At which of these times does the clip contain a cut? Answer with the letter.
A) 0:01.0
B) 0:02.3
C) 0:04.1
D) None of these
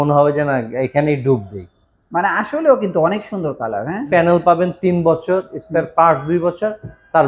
C